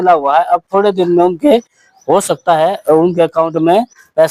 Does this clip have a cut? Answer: no; 0 cuts

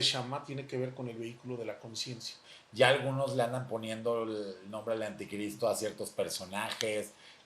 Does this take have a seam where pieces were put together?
yes; 1 cut; at 2.5 s

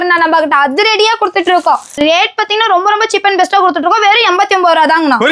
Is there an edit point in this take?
yes; 1 cut; at 2.0 s

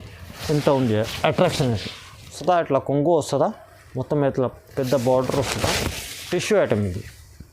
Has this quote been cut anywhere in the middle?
yes; 1 cut; at 2.4 s

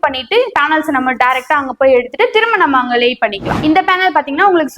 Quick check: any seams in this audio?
yes; 1 cut; at 3.5 s

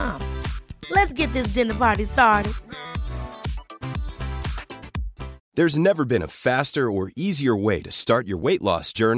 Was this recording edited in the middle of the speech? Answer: yes; 1 cut; at 5.4 s

